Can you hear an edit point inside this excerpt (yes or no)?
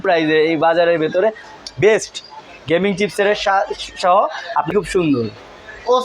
yes